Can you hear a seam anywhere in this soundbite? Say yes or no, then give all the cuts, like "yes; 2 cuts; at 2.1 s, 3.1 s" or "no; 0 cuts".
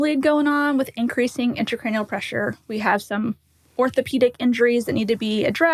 no; 0 cuts